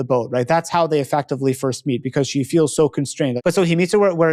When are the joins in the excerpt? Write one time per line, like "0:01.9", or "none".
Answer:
0:03.4